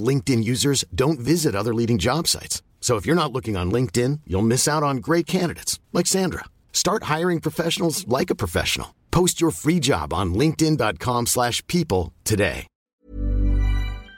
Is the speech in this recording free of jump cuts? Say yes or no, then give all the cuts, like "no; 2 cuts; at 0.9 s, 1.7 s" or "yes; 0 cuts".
no; 1 cut; at 12.7 s